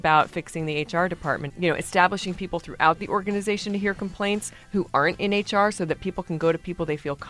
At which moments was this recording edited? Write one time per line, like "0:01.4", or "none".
0:01.5